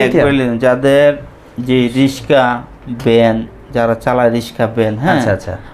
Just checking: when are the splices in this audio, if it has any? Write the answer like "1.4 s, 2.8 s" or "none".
none